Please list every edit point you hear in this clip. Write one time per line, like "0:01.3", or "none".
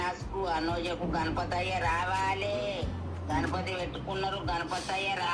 none